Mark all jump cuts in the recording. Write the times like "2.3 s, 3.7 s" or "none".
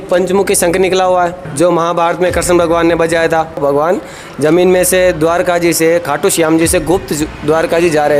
1.4 s, 3.6 s